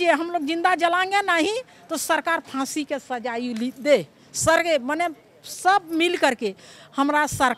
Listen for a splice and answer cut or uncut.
uncut